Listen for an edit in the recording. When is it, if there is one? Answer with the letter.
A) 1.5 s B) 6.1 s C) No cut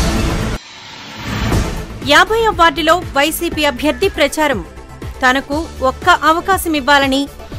C